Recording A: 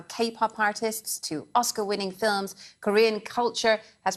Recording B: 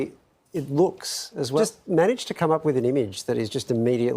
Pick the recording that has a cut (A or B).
B